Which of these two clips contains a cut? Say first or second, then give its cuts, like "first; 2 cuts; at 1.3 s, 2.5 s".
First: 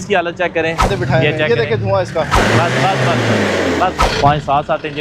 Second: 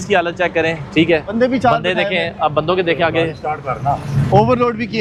first; 3 cuts; at 0.9 s, 2.4 s, 4.0 s